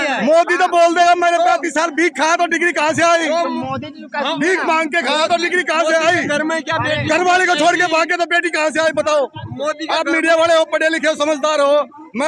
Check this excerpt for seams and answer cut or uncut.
uncut